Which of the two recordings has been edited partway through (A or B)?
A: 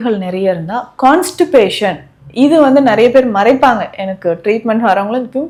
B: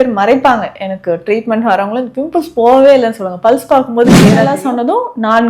B